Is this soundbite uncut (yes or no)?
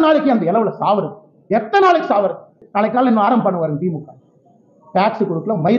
no